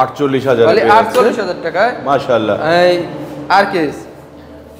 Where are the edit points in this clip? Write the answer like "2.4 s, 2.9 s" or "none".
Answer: none